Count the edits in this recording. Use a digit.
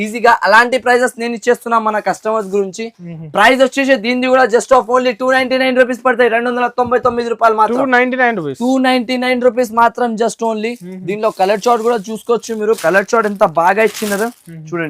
0